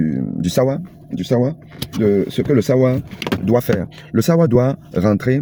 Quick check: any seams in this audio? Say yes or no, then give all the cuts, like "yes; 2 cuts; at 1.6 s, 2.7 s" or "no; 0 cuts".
no; 0 cuts